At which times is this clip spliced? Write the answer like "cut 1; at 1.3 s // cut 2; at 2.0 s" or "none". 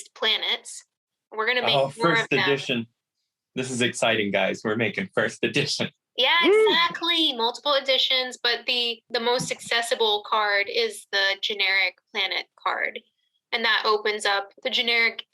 cut 1; at 9.0 s // cut 2; at 14.5 s